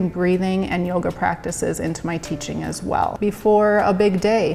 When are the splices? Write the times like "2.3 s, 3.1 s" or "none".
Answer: 3.2 s